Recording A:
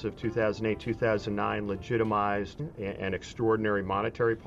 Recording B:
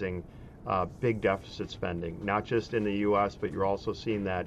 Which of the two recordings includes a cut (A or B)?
A